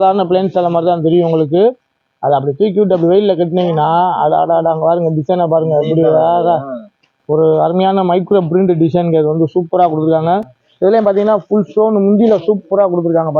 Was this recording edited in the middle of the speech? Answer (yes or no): no